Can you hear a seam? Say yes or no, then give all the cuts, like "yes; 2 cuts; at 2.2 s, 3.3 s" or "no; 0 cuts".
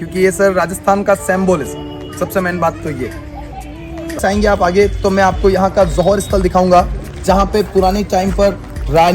yes; 1 cut; at 4.2 s